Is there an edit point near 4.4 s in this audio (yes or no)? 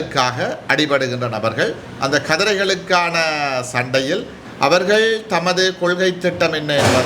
yes